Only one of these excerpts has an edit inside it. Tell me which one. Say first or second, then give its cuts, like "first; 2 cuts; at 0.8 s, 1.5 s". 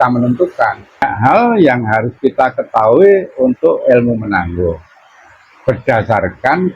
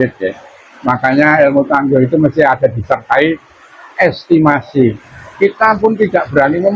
first; 1 cut; at 1.1 s